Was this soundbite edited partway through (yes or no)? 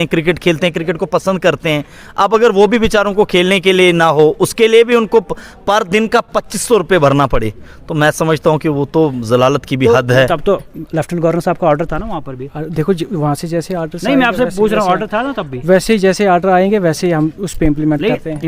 yes